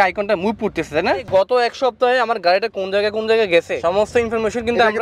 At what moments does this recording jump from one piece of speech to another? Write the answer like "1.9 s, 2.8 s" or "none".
1.3 s, 3.8 s